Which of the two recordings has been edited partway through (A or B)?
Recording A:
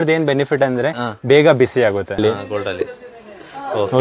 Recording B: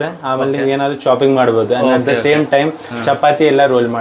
A